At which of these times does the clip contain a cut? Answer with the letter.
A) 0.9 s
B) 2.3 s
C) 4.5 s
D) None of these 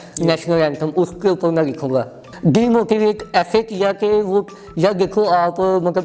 B